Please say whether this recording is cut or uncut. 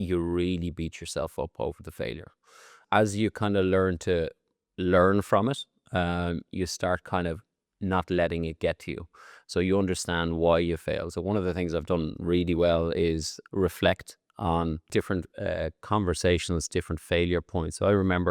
cut